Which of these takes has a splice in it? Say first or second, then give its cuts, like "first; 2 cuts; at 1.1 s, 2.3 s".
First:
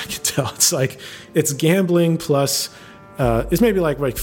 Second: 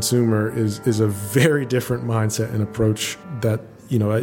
second; 1 cut; at 3.2 s